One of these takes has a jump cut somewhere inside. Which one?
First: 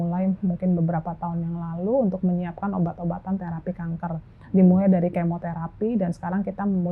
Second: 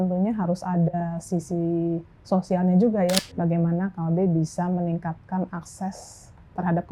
second; 1 cut; at 3.2 s

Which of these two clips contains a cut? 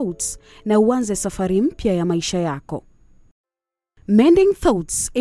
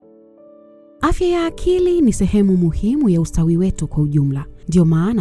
second; 1 cut; at 1.0 s

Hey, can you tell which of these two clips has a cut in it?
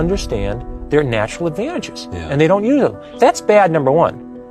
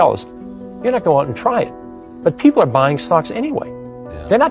first; 1 cut; at 3.0 s

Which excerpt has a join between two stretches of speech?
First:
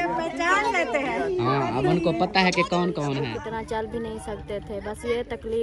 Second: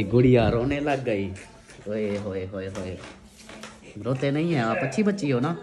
first; 1 cut; at 3.2 s

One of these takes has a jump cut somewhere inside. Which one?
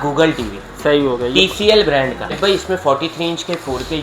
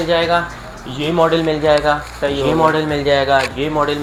first; 1 cut; at 2.4 s

